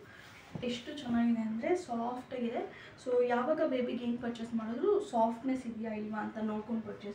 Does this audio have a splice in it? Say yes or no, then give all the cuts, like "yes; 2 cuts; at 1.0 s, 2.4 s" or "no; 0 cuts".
no; 0 cuts